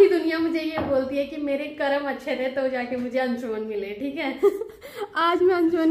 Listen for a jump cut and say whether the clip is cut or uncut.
uncut